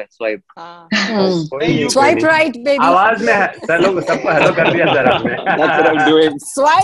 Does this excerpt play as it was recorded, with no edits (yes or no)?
yes